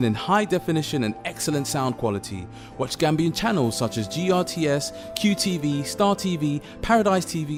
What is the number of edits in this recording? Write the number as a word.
zero